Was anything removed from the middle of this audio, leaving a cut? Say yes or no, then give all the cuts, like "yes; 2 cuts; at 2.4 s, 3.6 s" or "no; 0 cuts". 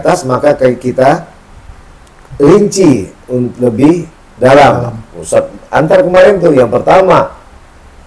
no; 0 cuts